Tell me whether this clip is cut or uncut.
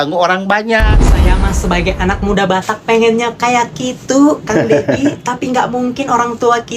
cut